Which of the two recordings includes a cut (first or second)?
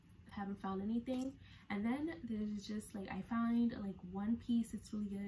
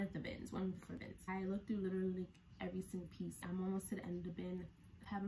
second